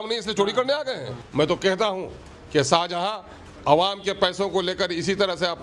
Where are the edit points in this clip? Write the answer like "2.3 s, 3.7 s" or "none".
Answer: 1.1 s